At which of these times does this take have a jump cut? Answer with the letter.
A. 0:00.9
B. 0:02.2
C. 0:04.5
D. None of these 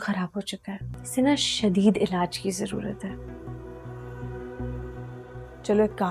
A